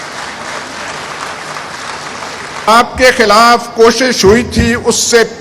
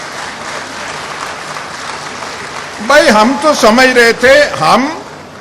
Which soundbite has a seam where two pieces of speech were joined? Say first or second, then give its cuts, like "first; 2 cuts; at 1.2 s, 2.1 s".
first; 1 cut; at 2.7 s